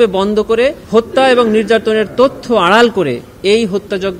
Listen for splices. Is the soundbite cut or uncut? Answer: uncut